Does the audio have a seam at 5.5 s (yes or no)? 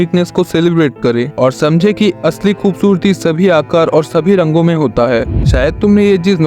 yes